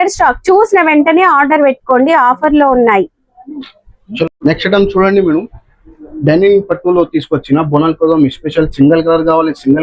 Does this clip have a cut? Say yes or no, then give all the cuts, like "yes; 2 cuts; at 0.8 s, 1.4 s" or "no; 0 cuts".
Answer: yes; 1 cut; at 4.4 s